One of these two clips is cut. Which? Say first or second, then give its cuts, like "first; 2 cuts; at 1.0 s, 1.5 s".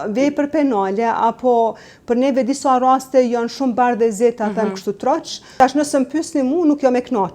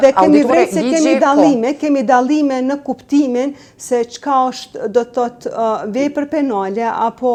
first; 1 cut; at 5.4 s